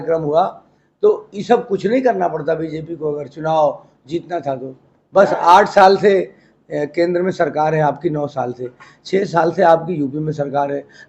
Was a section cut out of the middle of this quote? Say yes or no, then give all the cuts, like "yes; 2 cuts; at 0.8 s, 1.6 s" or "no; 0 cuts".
no; 0 cuts